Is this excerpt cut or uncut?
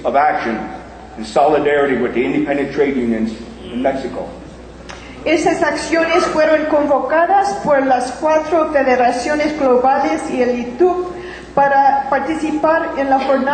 uncut